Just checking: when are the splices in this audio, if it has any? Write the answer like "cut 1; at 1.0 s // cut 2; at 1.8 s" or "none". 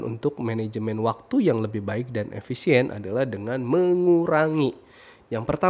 none